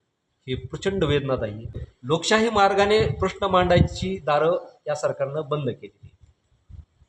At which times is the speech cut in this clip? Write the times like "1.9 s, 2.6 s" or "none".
1.9 s